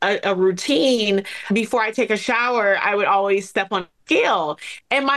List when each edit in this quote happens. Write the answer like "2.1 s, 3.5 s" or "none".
none